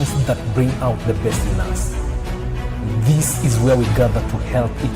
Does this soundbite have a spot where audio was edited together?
no; 0 cuts

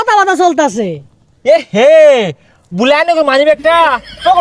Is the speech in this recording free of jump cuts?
yes; 0 cuts

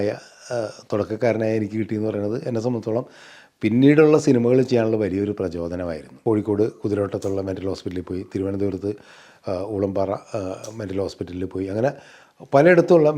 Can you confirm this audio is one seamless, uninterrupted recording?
no; 1 cut; at 6.0 s

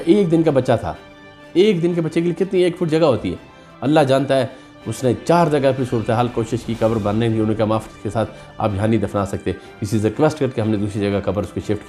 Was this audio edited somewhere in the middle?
no; 0 cuts

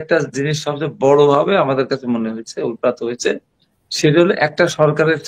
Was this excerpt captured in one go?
yes; 0 cuts

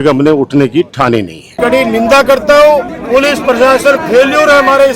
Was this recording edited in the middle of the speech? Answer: yes; 2 cuts; at 1.4 s, 3.0 s

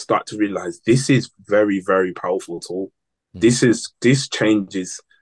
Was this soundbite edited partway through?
no; 0 cuts

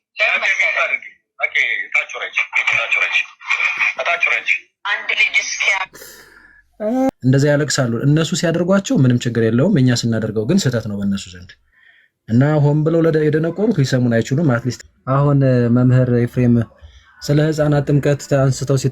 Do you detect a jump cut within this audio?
yes; 2 cuts; at 7.1 s, 14.8 s

